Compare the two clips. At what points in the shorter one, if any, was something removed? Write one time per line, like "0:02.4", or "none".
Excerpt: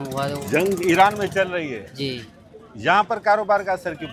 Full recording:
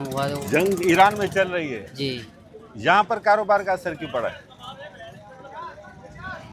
none